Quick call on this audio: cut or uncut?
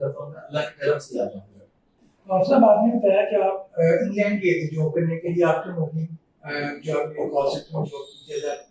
uncut